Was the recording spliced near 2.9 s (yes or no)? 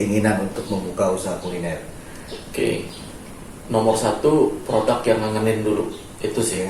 yes